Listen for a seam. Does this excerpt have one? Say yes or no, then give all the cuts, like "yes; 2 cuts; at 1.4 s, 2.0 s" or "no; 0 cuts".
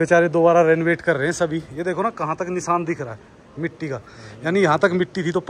no; 0 cuts